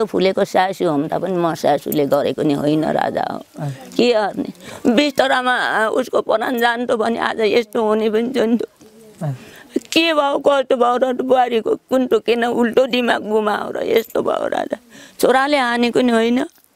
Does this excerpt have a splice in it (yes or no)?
no